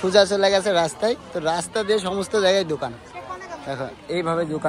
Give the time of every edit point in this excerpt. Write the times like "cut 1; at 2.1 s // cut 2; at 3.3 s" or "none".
none